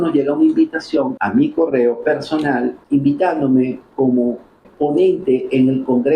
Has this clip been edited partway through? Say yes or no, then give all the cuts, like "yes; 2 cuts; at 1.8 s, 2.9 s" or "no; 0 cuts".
yes; 3 cuts; at 1.1 s, 2.8 s, 4.7 s